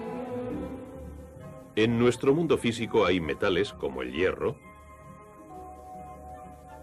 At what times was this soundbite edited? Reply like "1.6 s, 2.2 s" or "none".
1.8 s